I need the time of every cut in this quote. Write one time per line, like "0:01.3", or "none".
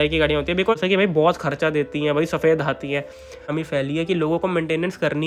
0:00.8
0:03.5